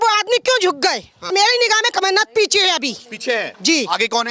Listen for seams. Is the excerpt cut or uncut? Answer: cut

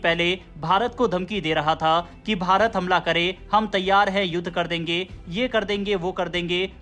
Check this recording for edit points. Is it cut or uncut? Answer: uncut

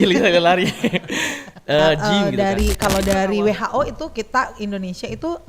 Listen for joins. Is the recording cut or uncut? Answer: cut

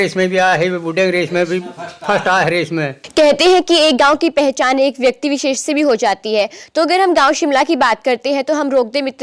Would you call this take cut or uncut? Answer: uncut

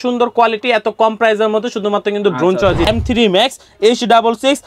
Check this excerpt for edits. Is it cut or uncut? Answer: cut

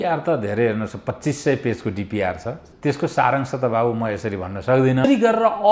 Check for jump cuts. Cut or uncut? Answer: cut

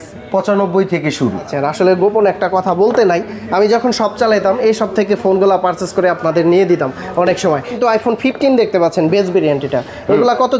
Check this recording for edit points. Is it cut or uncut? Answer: cut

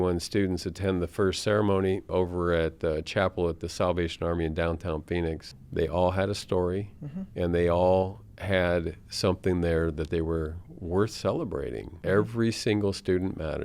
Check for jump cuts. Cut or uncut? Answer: cut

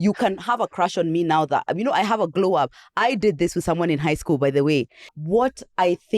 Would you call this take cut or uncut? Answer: cut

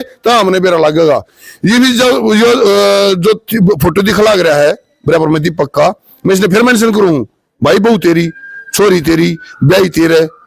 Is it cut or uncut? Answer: uncut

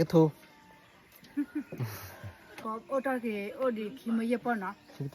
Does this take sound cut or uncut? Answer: cut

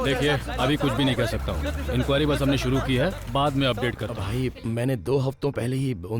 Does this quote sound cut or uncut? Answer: cut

